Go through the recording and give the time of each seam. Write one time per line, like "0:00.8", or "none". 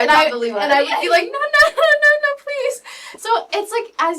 none

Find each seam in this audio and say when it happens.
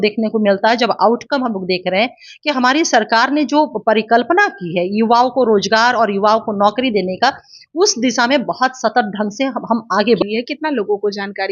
0:10.2

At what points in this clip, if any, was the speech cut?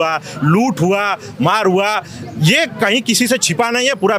none

